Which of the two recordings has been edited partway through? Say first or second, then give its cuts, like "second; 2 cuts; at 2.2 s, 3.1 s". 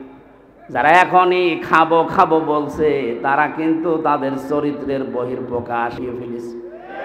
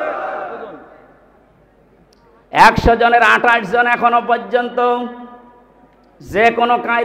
first; 1 cut; at 6.0 s